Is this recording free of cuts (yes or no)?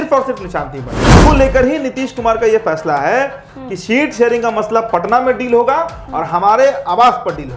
no